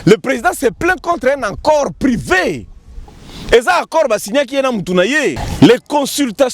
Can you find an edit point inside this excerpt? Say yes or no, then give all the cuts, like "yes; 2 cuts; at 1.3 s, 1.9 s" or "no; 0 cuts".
yes; 1 cut; at 5.4 s